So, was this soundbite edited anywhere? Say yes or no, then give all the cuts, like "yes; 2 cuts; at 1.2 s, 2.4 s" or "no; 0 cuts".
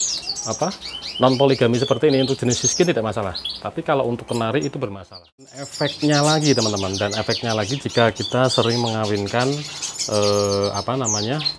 yes; 1 cut; at 5.7 s